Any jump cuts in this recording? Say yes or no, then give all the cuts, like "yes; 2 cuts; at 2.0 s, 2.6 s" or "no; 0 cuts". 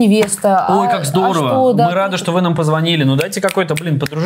no; 0 cuts